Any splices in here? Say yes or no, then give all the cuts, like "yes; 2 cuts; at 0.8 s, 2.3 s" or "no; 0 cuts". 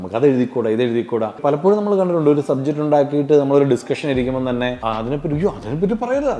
yes; 2 cuts; at 1.4 s, 4.8 s